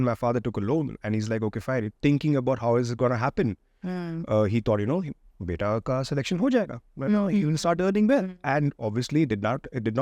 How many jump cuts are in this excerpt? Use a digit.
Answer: 0